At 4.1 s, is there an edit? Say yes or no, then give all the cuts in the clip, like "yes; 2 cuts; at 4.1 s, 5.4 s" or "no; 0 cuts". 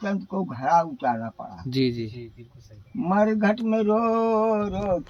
no; 0 cuts